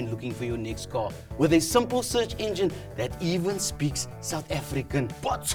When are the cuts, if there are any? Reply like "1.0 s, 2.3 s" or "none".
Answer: none